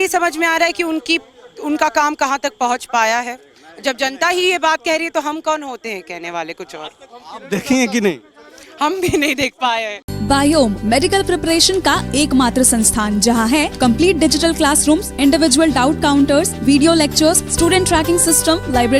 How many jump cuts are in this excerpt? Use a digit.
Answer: 0